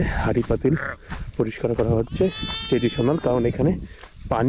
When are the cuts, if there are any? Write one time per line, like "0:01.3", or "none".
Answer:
none